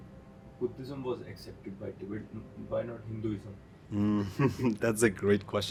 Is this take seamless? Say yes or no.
yes